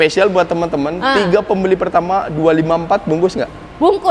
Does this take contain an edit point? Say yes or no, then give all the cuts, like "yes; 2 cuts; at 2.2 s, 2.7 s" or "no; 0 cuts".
no; 0 cuts